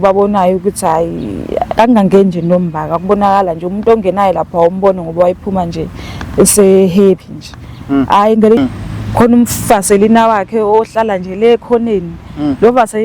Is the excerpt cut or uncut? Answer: cut